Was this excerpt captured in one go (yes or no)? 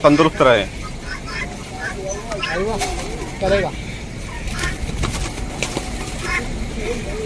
yes